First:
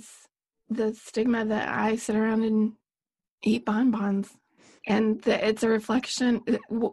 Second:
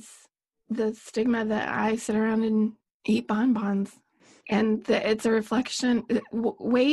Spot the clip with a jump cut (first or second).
second